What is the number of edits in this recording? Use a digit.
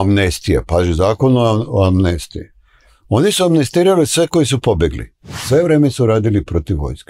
1